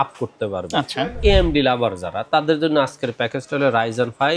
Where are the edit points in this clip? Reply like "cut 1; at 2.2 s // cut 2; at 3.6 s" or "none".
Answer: cut 1; at 1.2 s

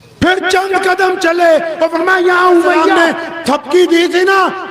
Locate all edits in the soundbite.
cut 1; at 2.9 s

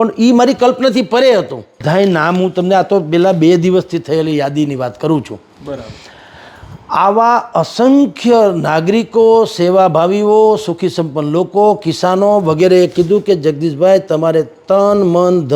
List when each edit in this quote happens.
cut 1; at 1.8 s

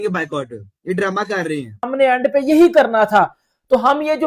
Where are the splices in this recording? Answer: cut 1; at 1.9 s

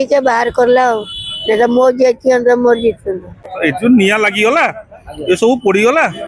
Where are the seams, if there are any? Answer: cut 1; at 3.5 s

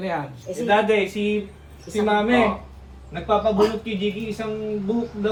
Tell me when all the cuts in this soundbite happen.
none

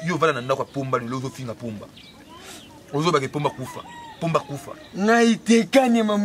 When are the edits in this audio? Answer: none

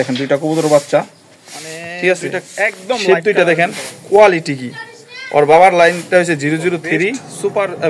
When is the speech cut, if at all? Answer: cut 1; at 3.1 s // cut 2; at 6.9 s

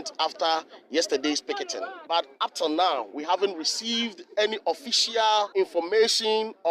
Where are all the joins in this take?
cut 1; at 1.9 s // cut 2; at 5.5 s

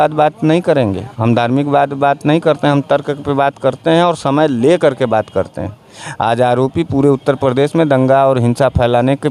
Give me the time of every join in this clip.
none

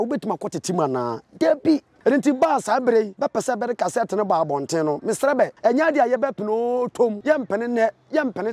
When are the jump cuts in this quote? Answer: cut 1; at 1.9 s // cut 2; at 3.1 s // cut 3; at 5.5 s // cut 4; at 7.2 s

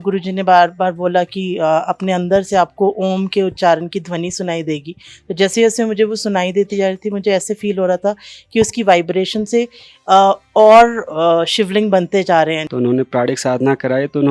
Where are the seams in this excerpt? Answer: cut 1; at 12.6 s

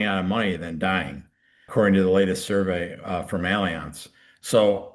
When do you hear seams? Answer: cut 1; at 1.7 s

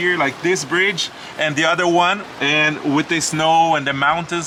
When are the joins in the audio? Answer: none

